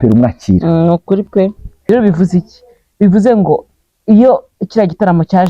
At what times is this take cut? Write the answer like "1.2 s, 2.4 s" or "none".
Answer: 1.7 s